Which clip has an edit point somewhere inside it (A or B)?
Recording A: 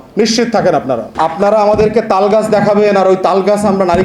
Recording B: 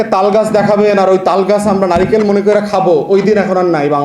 A